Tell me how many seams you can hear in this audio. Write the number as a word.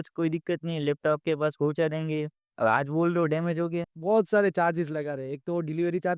one